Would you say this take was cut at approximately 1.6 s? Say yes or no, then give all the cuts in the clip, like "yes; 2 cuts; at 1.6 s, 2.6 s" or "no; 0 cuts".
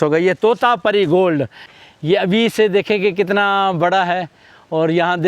yes; 1 cut; at 1.6 s